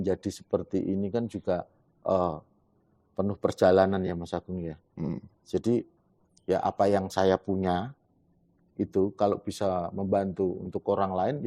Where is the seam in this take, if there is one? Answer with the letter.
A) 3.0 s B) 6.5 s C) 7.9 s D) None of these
D